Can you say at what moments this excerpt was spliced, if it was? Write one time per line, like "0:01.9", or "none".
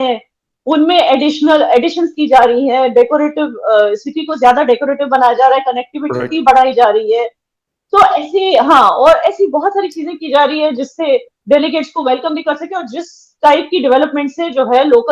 none